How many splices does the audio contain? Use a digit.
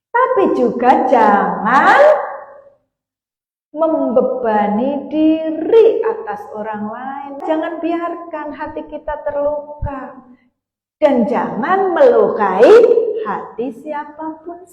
1